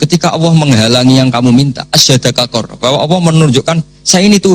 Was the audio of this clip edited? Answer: no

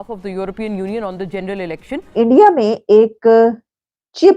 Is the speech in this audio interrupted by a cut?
yes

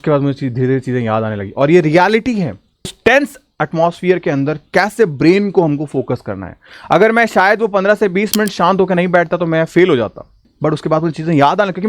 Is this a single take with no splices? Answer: no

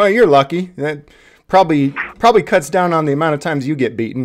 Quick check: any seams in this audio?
no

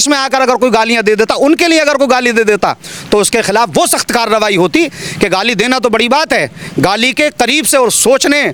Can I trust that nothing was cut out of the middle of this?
yes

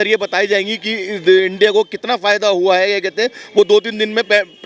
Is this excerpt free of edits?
yes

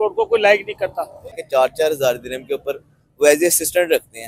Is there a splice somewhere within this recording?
yes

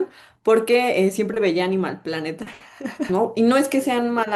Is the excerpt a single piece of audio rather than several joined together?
no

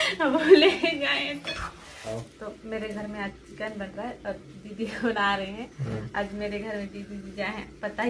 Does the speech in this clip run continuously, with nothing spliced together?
yes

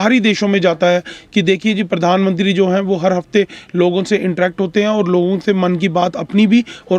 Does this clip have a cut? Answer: no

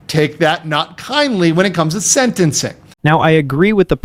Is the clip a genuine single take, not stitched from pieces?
yes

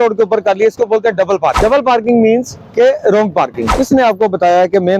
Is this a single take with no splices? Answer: no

